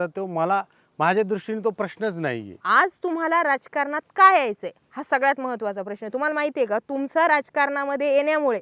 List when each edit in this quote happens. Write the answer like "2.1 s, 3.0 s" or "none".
2.5 s